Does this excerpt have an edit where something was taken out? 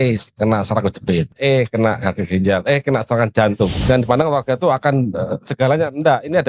yes; 2 cuts; at 1.3 s, 3.8 s

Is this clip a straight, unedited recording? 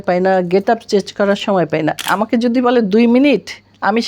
no; 1 cut; at 2.0 s

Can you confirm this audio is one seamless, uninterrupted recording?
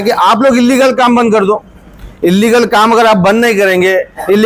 yes; 0 cuts

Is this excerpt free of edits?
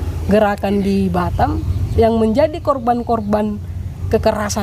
yes; 0 cuts

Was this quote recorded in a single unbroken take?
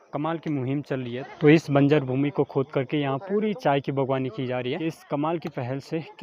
no; 2 cuts; at 1.3 s, 4.8 s

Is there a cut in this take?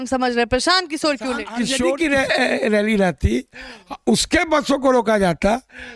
yes; 1 cut; at 1.8 s

